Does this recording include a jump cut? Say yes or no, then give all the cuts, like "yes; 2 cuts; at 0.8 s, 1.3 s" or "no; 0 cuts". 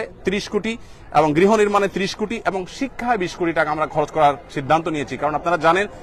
no; 0 cuts